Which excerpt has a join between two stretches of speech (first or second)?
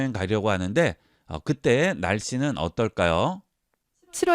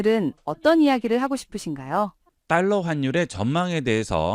second